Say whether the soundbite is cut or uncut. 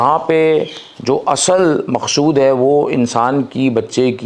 uncut